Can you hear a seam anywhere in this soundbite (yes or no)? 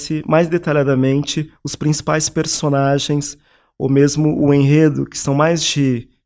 no